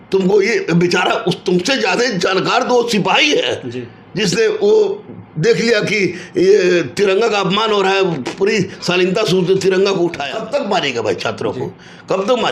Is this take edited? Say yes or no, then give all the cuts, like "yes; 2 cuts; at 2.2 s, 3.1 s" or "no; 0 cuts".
yes; 1 cut; at 10.3 s